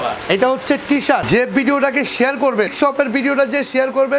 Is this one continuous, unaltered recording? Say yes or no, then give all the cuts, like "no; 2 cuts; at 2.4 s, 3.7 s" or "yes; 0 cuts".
no; 2 cuts; at 1.2 s, 2.7 s